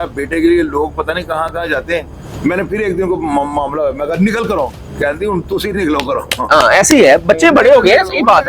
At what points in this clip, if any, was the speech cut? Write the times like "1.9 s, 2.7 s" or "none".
2.2 s